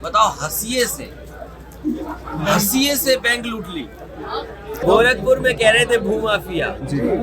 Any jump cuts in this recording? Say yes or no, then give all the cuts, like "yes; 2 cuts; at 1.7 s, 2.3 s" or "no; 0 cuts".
yes; 1 cut; at 4.8 s